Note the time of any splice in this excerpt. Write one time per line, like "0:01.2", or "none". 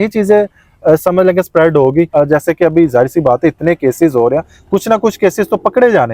0:02.1